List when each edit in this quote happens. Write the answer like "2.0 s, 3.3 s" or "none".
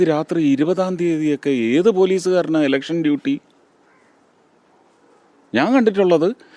none

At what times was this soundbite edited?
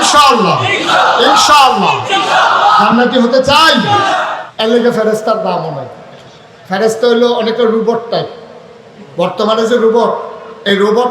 4.2 s

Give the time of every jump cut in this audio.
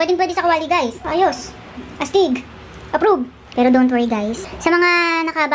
1.0 s, 3.4 s

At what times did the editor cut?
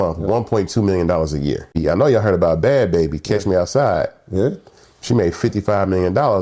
1.8 s

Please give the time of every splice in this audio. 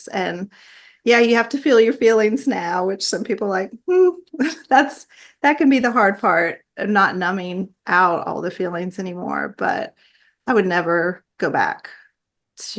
none

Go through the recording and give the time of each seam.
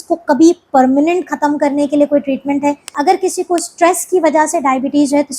2.9 s

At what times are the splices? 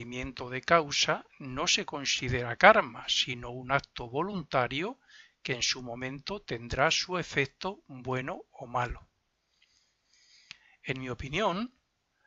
none

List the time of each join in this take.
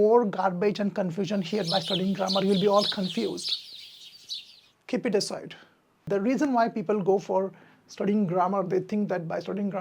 6.0 s

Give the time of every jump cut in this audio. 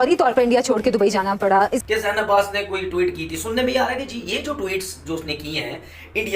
1.8 s

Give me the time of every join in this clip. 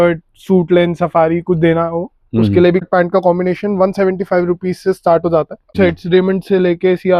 2.8 s, 5.7 s

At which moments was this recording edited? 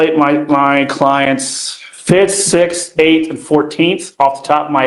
none

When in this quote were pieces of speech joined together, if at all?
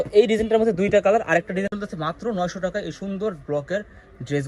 1.7 s

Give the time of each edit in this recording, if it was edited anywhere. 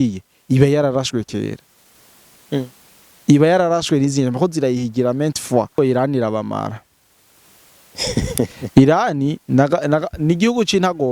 5.7 s

